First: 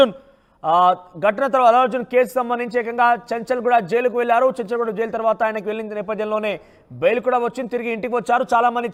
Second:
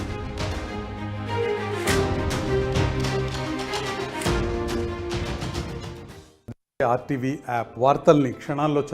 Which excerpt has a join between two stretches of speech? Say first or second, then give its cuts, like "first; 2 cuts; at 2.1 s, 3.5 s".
second; 1 cut; at 4.9 s